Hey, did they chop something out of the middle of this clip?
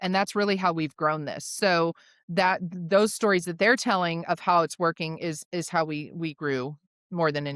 no; 0 cuts

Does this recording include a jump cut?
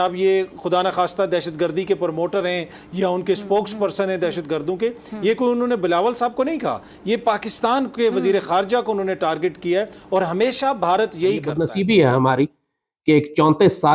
yes; 1 cut; at 11.6 s

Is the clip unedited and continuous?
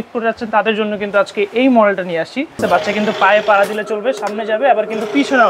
no; 1 cut; at 2.6 s

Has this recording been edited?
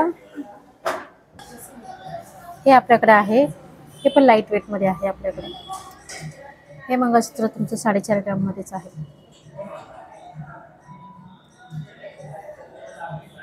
yes; 1 cut; at 1.4 s

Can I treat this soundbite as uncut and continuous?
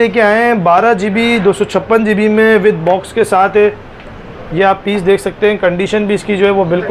yes; 0 cuts

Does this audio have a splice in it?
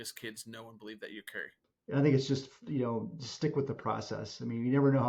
yes; 1 cut; at 1.7 s

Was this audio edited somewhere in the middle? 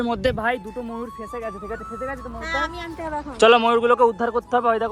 no; 0 cuts

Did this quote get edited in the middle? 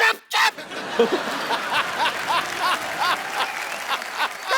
no; 0 cuts

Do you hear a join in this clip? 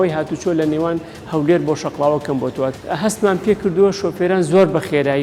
yes; 1 cut; at 2.8 s

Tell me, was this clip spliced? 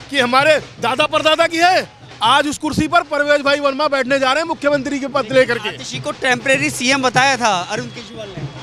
no; 0 cuts

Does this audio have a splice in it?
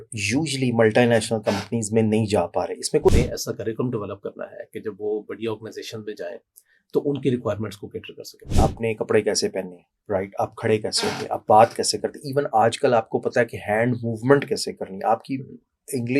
yes; 2 cuts; at 3.1 s, 8.5 s

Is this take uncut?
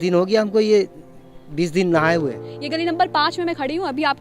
no; 1 cut; at 2.5 s

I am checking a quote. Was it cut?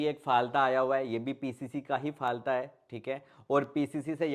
no; 0 cuts

